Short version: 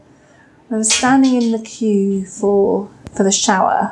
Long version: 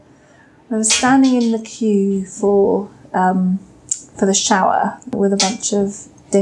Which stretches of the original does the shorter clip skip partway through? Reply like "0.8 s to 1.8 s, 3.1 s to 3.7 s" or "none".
3.0 s to 4.0 s